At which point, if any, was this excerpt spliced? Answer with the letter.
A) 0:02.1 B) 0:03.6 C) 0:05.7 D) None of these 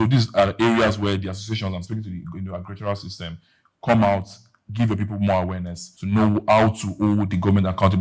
D